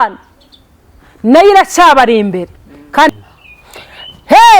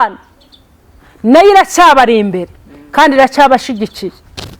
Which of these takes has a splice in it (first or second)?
first